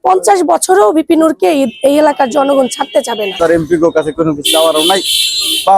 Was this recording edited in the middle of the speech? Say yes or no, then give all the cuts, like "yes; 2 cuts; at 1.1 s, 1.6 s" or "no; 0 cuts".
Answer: yes; 1 cut; at 3.3 s